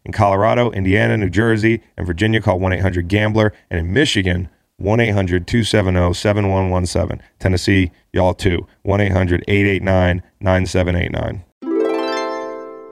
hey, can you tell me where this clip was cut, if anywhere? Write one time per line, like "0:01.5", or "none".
0:11.5